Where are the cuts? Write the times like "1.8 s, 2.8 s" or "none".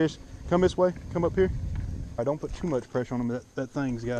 2.0 s